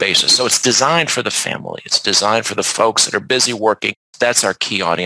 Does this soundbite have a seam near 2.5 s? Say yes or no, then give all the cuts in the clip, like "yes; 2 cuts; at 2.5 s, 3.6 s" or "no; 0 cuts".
no; 1 cut; at 4.1 s